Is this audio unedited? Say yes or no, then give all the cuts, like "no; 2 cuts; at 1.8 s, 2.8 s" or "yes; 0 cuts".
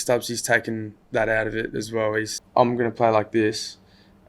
no; 2 cuts; at 0.9 s, 2.4 s